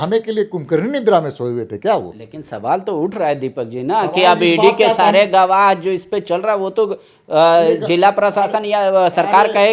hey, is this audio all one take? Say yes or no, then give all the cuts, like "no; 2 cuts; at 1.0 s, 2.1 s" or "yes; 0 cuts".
yes; 0 cuts